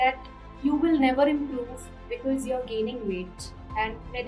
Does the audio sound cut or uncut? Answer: uncut